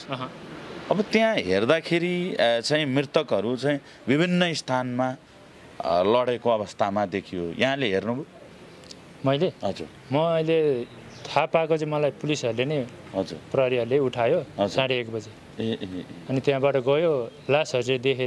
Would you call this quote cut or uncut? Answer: uncut